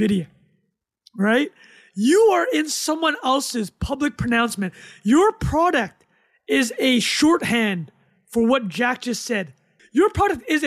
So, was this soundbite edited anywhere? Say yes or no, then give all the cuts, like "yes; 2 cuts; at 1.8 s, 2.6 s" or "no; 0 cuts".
yes; 1 cut; at 9.7 s